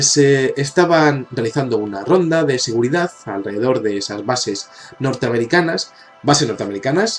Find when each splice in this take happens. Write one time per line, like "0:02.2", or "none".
0:04.4